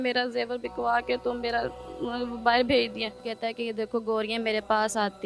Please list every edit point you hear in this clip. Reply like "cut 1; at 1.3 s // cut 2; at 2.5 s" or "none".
cut 1; at 3.3 s